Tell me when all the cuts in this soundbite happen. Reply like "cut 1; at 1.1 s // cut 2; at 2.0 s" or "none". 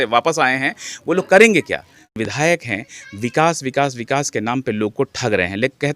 cut 1; at 2.2 s

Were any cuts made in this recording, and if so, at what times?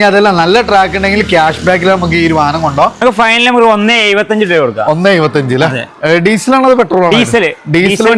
cut 1; at 3.0 s

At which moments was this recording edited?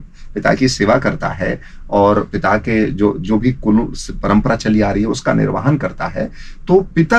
none

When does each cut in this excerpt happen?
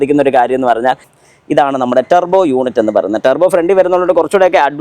cut 1; at 1.1 s

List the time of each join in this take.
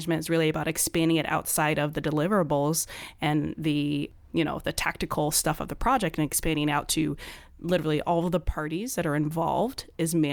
none

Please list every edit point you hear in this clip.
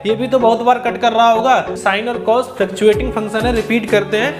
cut 1; at 1.7 s

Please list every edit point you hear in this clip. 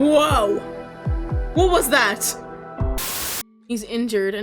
cut 1; at 3.0 s

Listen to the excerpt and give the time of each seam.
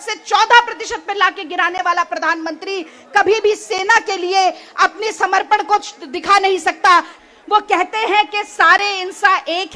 cut 1; at 7.2 s

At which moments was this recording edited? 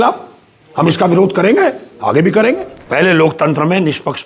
cut 1; at 2.7 s

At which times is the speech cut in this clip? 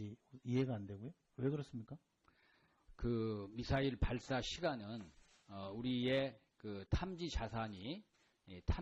cut 1; at 7.5 s

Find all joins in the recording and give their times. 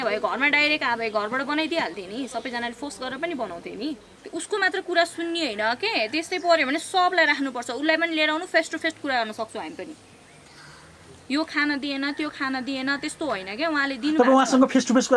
cut 1; at 4.1 s

